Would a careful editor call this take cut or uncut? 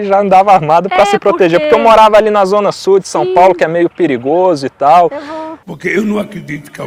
uncut